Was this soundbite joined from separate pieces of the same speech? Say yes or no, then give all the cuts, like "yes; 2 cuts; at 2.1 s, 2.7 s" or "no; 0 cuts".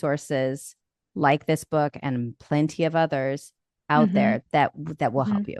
no; 0 cuts